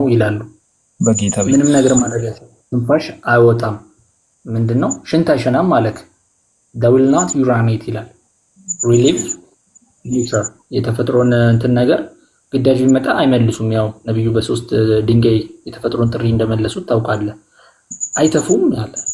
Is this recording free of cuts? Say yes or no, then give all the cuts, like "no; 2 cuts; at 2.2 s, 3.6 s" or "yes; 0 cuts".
yes; 0 cuts